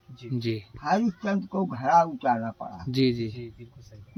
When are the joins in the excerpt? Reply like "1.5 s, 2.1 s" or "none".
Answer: none